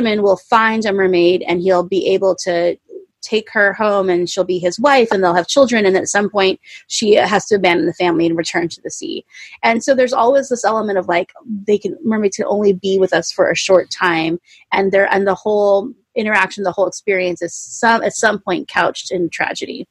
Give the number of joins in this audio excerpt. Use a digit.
0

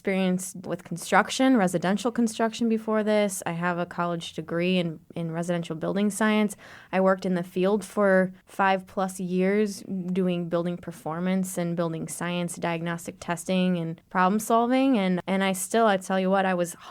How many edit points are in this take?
0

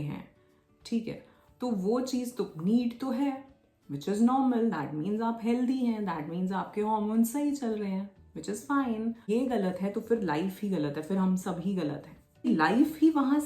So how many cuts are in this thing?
2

